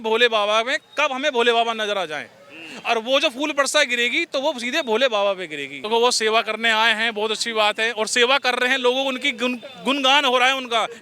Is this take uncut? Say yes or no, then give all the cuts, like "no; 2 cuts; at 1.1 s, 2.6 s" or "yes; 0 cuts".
no; 1 cut; at 5.7 s